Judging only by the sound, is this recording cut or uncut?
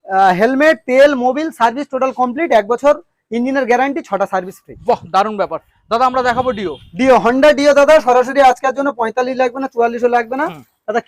uncut